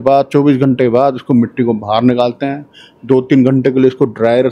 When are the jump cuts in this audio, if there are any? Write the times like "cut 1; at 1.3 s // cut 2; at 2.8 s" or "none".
none